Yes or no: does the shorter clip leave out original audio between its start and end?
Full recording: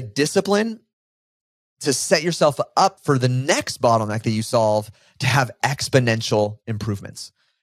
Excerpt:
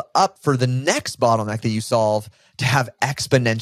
no